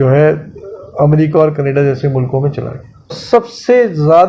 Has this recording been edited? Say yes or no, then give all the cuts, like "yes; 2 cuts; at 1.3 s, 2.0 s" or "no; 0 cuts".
yes; 1 cut; at 3.2 s